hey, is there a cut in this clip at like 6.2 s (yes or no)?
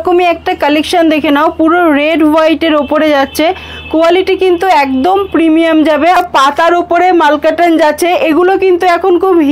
yes